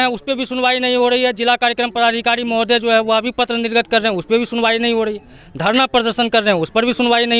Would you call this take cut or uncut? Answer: uncut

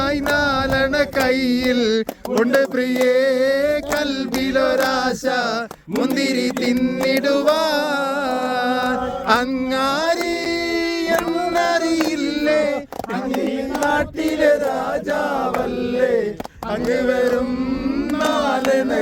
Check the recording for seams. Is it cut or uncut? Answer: uncut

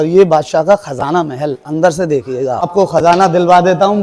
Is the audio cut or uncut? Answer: cut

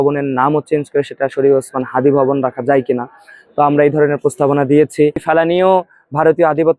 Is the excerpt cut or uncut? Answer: cut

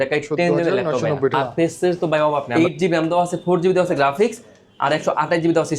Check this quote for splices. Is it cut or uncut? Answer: cut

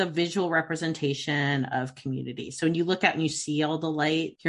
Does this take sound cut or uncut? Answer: uncut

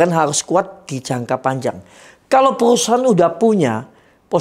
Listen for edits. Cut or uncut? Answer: uncut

